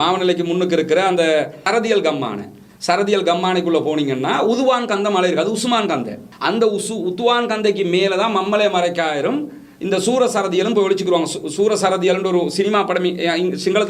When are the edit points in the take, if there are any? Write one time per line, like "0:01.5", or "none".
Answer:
none